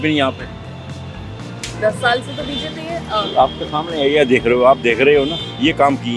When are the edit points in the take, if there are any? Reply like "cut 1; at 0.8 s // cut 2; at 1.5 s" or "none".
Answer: none